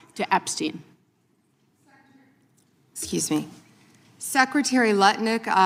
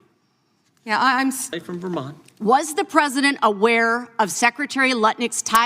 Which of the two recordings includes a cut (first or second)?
second